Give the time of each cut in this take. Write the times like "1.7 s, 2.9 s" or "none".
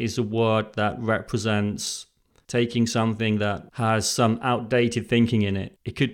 none